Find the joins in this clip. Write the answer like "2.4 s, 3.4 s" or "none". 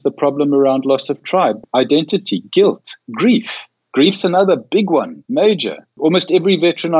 1.6 s, 5.2 s, 5.9 s